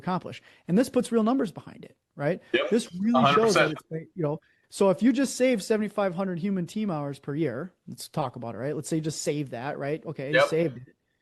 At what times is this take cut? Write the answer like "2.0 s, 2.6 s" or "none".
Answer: none